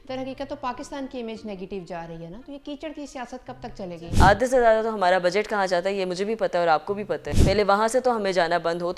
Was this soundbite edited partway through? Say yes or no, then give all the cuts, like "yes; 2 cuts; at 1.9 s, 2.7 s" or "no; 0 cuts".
yes; 2 cuts; at 4.0 s, 7.3 s